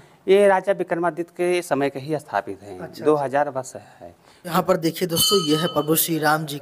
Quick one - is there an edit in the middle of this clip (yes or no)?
yes